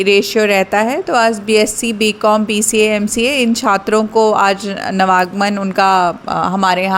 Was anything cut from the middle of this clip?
no; 0 cuts

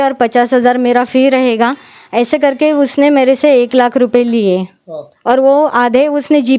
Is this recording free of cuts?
yes; 0 cuts

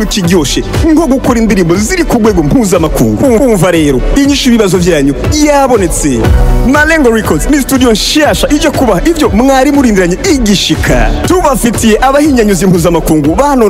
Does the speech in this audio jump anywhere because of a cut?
no; 0 cuts

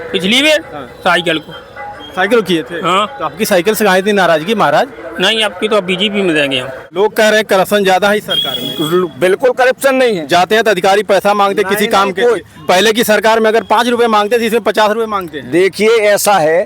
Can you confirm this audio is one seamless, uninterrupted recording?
no; 1 cut; at 6.9 s

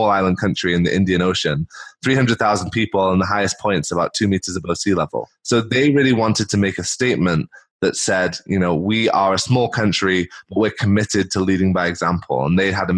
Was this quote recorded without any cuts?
yes; 0 cuts

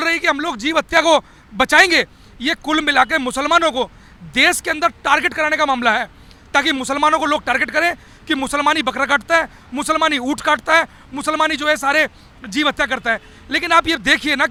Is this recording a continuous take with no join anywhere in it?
yes; 0 cuts

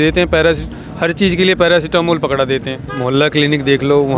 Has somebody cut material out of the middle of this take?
yes; 1 cut; at 2.9 s

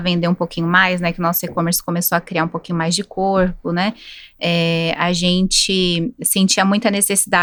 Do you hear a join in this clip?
no; 0 cuts

